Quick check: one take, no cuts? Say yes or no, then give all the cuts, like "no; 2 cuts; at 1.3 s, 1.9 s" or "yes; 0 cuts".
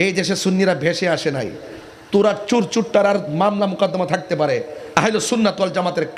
yes; 0 cuts